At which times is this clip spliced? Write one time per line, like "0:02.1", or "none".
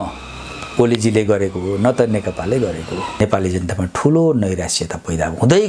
0:03.0